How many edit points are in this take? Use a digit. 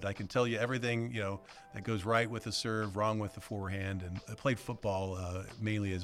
1